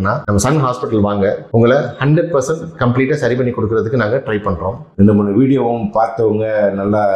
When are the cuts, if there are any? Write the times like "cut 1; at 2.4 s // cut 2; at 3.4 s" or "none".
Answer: cut 1; at 4.9 s